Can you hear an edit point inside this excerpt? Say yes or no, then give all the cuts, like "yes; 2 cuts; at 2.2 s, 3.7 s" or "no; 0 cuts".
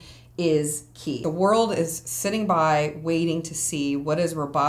yes; 1 cut; at 1.2 s